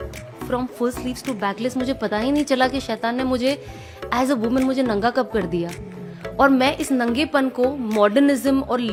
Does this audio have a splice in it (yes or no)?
no